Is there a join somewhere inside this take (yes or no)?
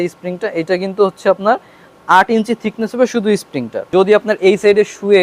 yes